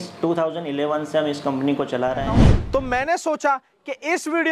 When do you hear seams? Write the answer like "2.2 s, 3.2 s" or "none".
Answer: 2.5 s